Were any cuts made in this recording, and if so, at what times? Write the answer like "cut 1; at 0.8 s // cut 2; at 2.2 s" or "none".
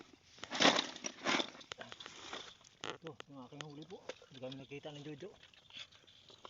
none